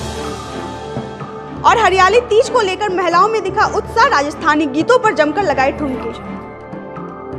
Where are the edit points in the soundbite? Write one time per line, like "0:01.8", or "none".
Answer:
0:01.4